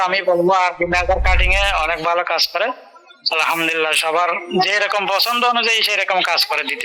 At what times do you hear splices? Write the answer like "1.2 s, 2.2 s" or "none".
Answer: none